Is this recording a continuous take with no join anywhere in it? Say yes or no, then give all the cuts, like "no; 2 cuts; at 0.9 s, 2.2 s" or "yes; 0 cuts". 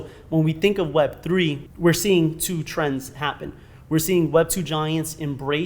no; 1 cut; at 1.6 s